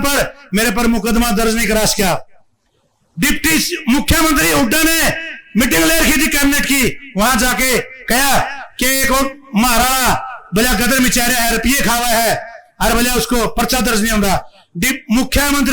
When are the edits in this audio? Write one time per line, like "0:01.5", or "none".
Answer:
none